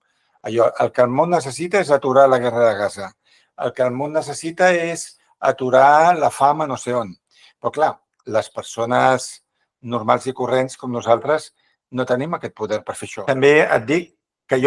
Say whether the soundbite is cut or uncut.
cut